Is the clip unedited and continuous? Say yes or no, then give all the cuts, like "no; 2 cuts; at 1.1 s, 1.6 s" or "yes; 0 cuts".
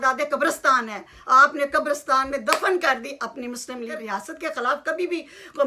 no; 1 cut; at 4.0 s